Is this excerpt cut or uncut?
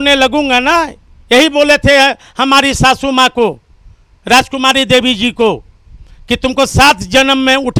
uncut